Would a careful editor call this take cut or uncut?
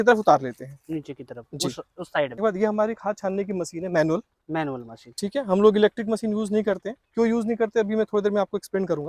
cut